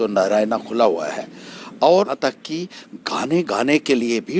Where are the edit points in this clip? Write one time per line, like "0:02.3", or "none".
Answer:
0:02.1